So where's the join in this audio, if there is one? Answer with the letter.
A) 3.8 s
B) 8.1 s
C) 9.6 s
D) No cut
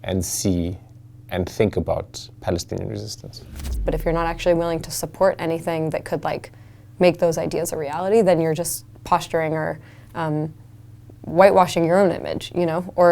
A